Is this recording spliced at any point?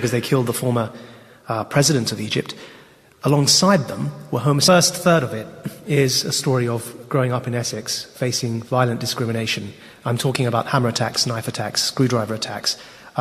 no; 0 cuts

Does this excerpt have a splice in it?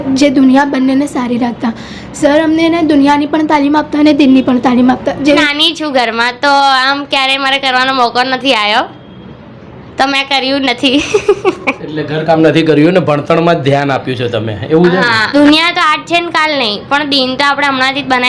yes; 2 cuts; at 5.4 s, 15.2 s

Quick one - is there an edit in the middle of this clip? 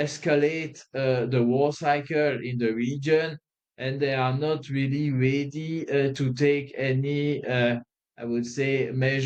no; 0 cuts

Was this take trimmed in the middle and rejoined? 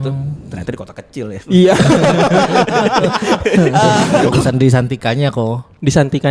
yes; 1 cut; at 4.3 s

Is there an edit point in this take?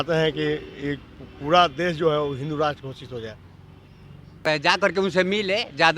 yes; 1 cut; at 4.4 s

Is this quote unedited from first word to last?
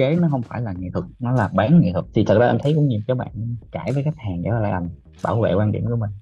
no; 2 cuts; at 1.0 s, 2.0 s

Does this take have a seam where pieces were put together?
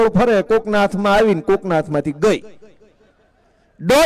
no; 0 cuts

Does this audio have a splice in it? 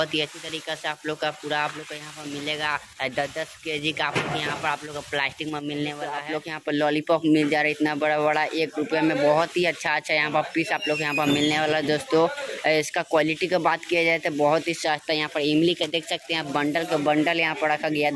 yes; 1 cut; at 6.3 s

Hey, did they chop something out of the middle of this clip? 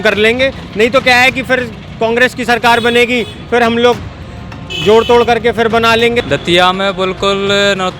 yes; 1 cut; at 6.2 s

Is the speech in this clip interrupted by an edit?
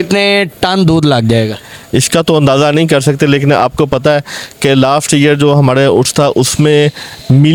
no; 0 cuts

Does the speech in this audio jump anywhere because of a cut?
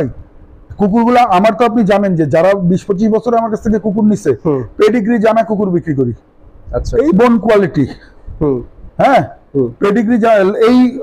no; 0 cuts

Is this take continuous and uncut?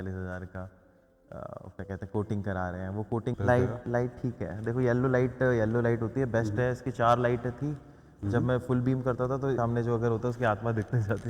no; 2 cuts; at 3.4 s, 9.6 s

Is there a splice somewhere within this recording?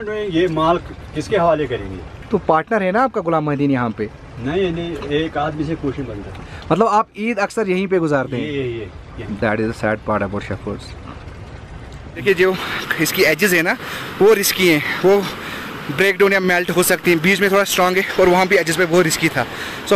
yes; 1 cut; at 12.1 s

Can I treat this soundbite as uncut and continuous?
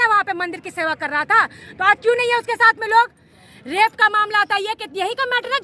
yes; 0 cuts

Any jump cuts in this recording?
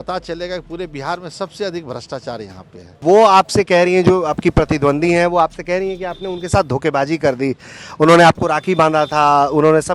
yes; 1 cut; at 3.0 s

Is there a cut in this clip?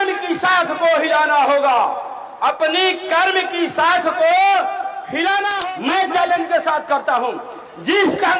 yes; 1 cut; at 5.5 s

